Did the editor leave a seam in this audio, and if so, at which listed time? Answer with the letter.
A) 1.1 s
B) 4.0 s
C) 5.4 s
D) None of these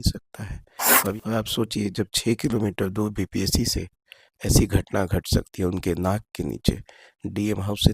A